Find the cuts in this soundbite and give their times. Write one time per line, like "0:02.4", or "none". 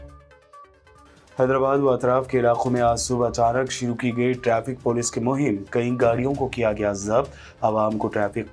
0:01.0